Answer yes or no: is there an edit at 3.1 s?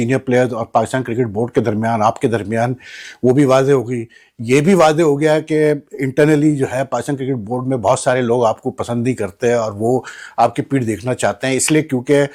no